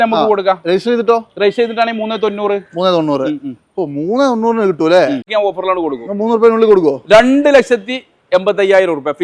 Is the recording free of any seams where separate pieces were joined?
no; 1 cut; at 5.3 s

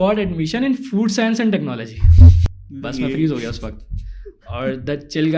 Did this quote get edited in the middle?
yes; 1 cut; at 2.4 s

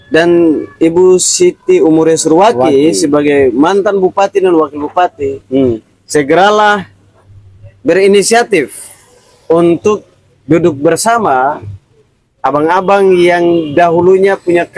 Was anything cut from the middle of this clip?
no; 0 cuts

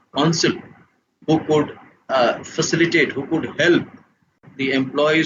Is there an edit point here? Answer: yes; 1 cut; at 4.0 s

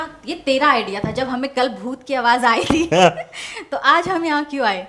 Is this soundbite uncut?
yes; 0 cuts

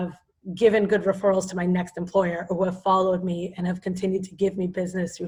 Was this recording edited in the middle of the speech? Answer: no; 0 cuts

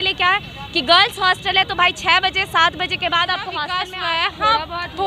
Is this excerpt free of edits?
no; 1 cut; at 3.7 s

